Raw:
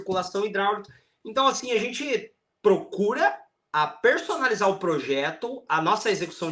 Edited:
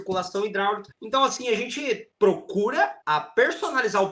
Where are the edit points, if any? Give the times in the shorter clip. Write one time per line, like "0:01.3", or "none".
0:00.9
0:02.1
0:03.0